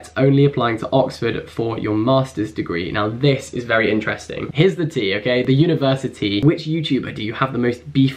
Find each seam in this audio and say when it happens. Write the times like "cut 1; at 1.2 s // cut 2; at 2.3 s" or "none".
cut 1; at 4.4 s // cut 2; at 6.4 s